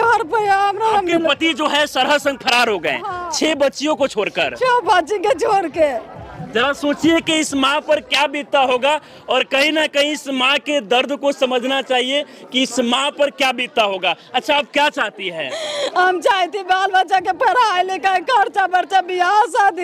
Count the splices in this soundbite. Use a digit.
0